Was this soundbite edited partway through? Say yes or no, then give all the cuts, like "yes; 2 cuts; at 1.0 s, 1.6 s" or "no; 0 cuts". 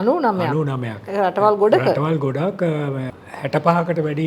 no; 0 cuts